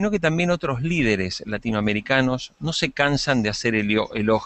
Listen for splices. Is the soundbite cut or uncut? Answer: cut